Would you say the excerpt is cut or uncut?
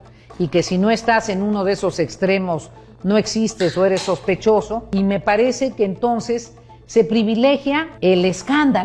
cut